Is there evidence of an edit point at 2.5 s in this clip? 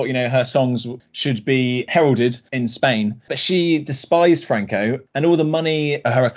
yes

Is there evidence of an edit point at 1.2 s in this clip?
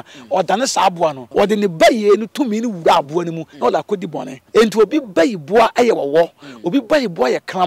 yes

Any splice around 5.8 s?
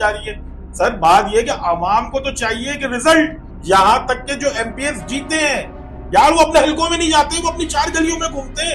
no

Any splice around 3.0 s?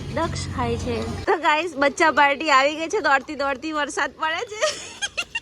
no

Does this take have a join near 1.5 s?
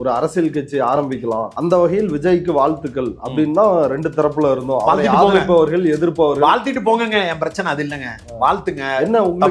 yes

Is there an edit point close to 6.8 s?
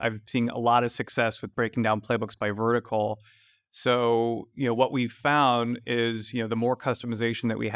no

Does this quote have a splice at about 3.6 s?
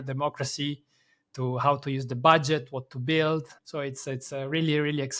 yes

